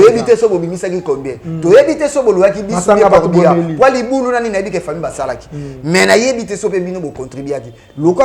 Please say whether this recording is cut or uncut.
uncut